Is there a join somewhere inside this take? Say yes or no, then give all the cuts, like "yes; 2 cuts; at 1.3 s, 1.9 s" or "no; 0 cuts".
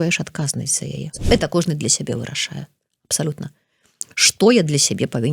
yes; 1 cut; at 1.1 s